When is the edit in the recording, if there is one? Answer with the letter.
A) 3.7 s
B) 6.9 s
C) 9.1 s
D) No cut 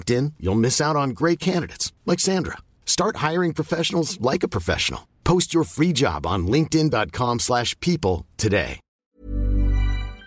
C